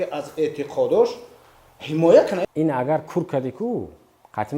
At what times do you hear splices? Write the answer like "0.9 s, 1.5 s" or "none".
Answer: 2.4 s